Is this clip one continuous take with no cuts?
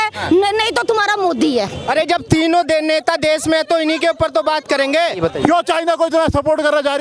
no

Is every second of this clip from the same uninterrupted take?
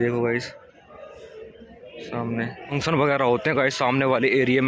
no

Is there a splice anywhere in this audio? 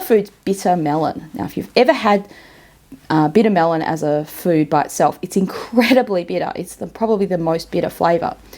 no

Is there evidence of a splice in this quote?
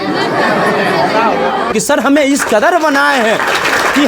yes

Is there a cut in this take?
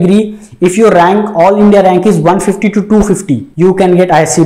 yes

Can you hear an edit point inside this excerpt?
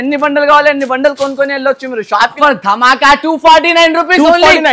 yes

